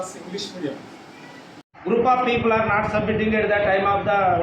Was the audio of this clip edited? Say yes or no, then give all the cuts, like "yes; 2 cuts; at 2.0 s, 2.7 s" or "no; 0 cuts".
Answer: yes; 1 cut; at 1.7 s